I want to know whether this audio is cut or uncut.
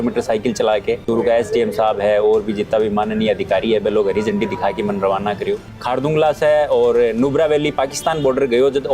cut